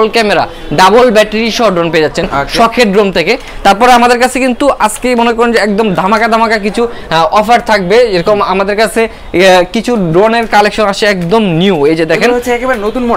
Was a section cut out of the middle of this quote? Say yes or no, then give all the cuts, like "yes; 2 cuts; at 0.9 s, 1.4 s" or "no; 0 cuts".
no; 0 cuts